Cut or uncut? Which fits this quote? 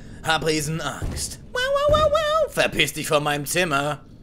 uncut